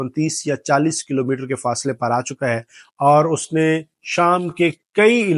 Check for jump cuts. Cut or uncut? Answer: uncut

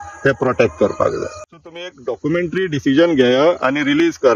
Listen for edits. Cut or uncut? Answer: cut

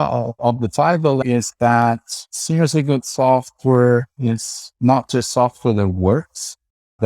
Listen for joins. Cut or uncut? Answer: cut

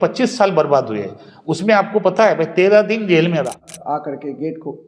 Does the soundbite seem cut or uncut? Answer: cut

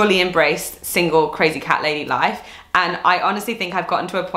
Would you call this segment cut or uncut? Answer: uncut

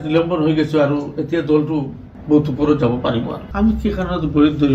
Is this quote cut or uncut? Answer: cut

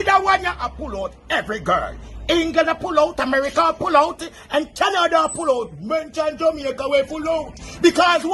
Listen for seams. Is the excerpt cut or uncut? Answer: uncut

